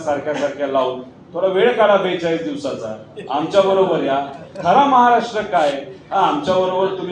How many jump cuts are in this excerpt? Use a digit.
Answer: 0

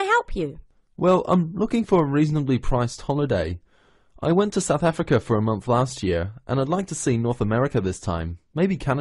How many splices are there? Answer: 0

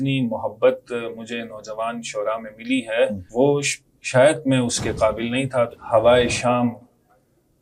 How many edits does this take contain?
2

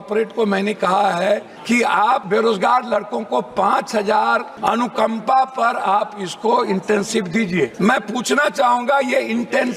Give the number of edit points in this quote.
3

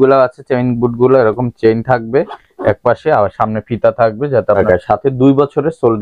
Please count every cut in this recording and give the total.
1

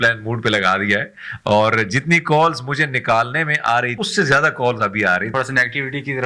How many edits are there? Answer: 2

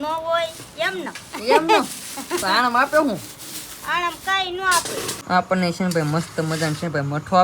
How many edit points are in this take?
1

